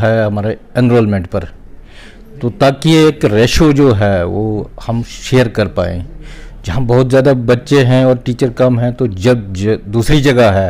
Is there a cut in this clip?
no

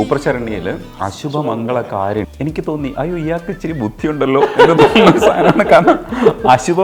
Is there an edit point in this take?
yes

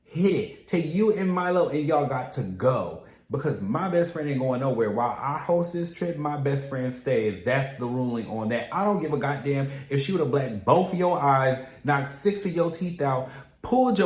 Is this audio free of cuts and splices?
yes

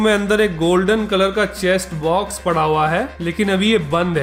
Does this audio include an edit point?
no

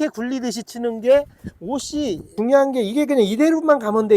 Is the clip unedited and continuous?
no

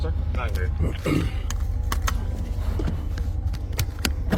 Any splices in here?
no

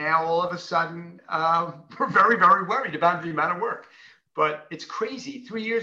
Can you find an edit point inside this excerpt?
no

